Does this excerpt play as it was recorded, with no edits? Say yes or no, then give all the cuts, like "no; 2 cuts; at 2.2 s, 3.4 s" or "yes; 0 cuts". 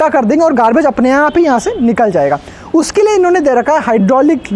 yes; 0 cuts